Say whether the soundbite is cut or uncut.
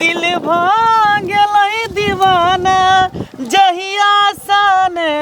uncut